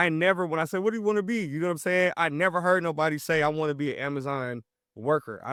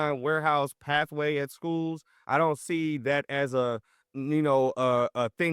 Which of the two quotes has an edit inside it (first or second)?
second